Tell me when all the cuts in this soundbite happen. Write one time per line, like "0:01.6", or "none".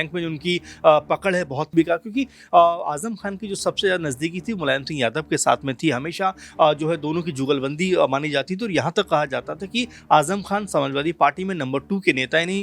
0:01.7

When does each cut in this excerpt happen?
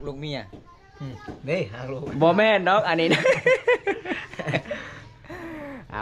none

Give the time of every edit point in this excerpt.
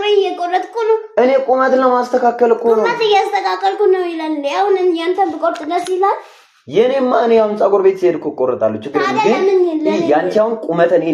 none

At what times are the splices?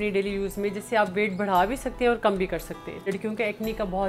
0:03.0

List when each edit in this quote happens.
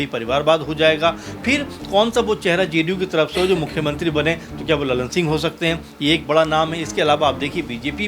none

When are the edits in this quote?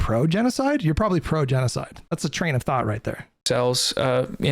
0:01.9
0:03.3

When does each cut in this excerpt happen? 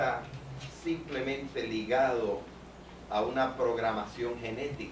0:01.6

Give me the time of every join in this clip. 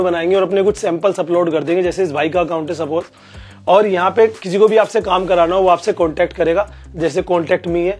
none

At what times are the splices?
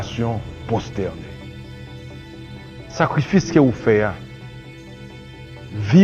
0:01.1
0:02.9

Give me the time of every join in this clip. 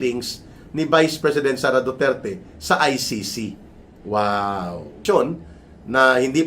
0:04.9

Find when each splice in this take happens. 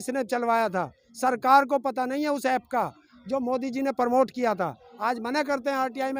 none

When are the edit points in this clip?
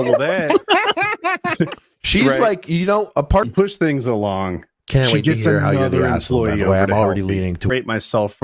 0:03.5
0:07.7

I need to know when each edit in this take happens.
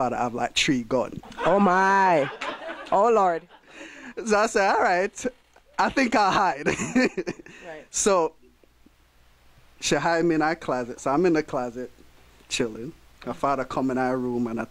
none

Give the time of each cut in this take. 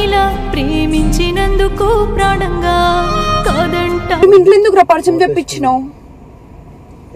0:04.2

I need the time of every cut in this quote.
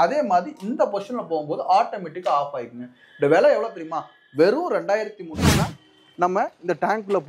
0:05.4

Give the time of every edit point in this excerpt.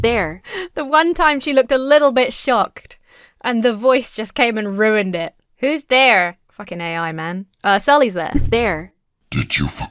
none

